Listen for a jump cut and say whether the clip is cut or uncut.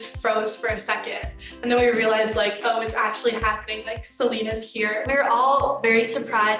uncut